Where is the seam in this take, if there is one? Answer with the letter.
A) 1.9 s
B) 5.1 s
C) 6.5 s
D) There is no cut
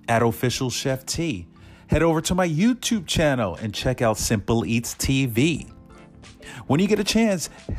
D